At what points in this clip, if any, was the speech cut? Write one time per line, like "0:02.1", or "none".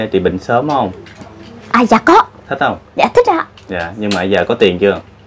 0:02.4